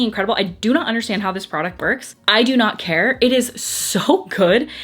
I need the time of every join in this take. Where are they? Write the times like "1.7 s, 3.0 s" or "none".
none